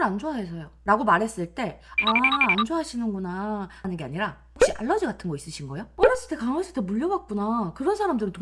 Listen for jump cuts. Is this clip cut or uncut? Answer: cut